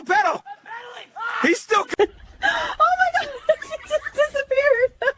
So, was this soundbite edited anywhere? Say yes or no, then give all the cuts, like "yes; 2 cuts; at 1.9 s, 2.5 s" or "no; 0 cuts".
yes; 1 cut; at 1.9 s